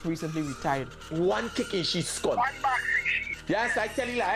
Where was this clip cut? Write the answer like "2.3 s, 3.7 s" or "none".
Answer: 1.1 s